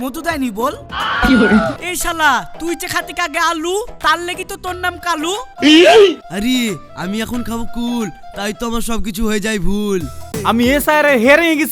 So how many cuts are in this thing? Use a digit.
2